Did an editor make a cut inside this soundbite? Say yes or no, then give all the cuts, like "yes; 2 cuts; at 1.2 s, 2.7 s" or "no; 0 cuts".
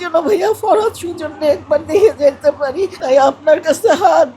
yes; 1 cut; at 3.0 s